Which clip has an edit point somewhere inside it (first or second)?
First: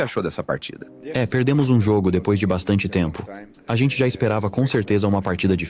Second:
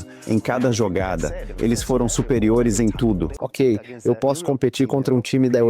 second